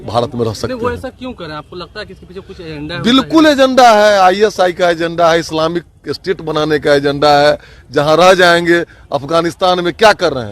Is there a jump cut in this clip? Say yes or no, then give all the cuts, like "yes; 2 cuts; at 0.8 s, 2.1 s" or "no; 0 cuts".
no; 0 cuts